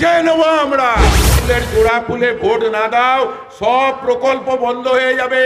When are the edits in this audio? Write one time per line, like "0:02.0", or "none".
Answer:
0:01.4